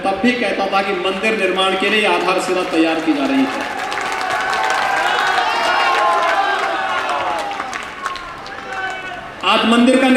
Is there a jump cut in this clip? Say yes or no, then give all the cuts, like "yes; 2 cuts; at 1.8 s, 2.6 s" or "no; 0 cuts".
no; 0 cuts